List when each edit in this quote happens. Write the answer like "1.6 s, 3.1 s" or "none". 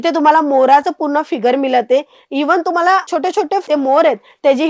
3.6 s